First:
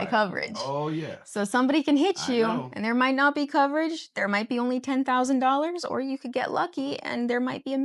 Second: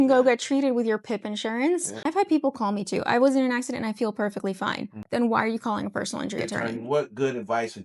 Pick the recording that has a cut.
second; 3 cuts; at 2.0 s, 4.9 s, 6.6 s

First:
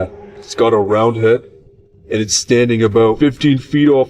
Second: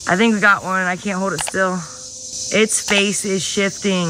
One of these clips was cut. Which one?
first; 1 cut; at 3.2 s

